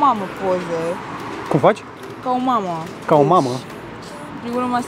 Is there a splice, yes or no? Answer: no